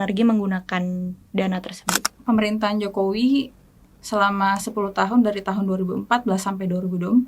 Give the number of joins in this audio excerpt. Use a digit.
1